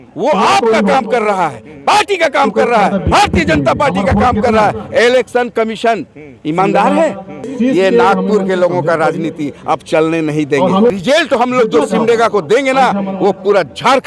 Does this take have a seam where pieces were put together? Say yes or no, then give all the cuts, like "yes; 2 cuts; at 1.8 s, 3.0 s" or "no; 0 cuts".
yes; 2 cuts; at 7.5 s, 10.9 s